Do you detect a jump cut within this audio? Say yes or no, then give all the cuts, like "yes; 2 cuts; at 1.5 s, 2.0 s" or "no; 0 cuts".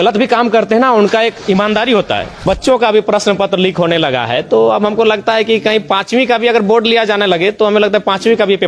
yes; 1 cut; at 2.4 s